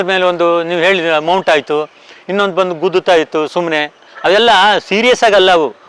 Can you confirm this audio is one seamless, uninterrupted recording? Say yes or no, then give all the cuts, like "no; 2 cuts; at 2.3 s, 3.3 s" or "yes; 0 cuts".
yes; 0 cuts